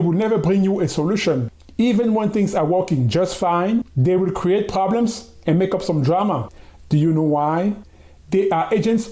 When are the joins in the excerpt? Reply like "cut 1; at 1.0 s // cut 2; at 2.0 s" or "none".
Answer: cut 1; at 1.5 s // cut 2; at 3.9 s // cut 3; at 6.9 s

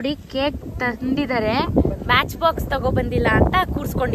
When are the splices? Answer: none

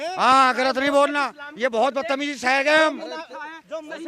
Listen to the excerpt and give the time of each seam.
none

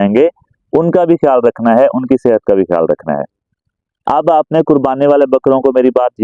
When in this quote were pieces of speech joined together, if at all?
cut 1; at 4.0 s

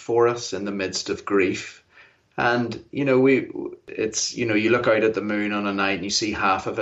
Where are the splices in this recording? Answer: cut 1; at 3.9 s

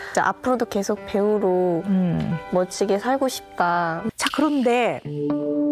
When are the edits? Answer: cut 1; at 4.0 s

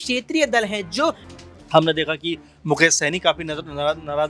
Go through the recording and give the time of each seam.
cut 1; at 1.3 s

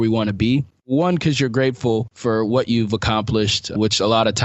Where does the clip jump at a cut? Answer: cut 1; at 0.9 s // cut 2; at 2.1 s

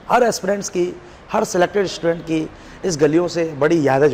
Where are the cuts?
none

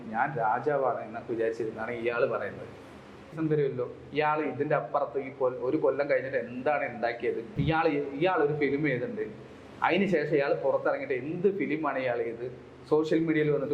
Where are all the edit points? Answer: cut 1; at 3.4 s // cut 2; at 7.5 s

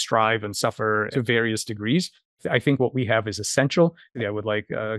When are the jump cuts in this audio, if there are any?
cut 1; at 1.1 s // cut 2; at 2.4 s // cut 3; at 4.1 s

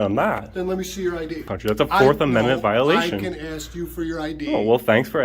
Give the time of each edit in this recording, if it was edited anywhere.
cut 1; at 1.4 s

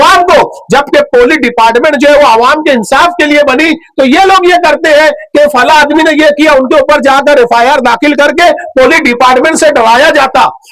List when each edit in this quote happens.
none

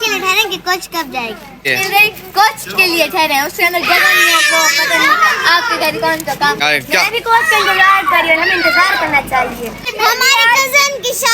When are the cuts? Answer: cut 1; at 1.6 s // cut 2; at 6.6 s // cut 3; at 9.9 s

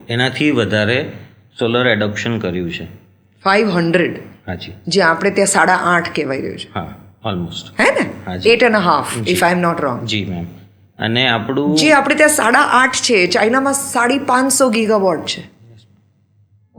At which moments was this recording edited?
none

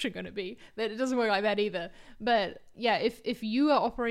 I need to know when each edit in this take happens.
cut 1; at 2.7 s

